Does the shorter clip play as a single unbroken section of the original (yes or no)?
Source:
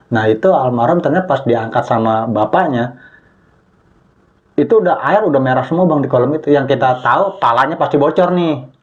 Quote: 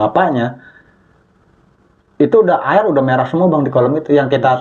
yes